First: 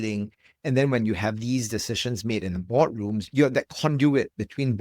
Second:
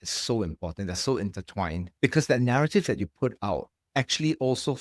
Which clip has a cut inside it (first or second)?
first